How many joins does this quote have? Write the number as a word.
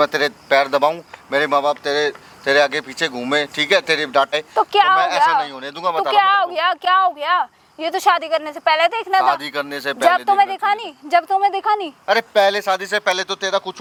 zero